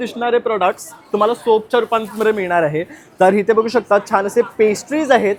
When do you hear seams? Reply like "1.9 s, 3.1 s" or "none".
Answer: none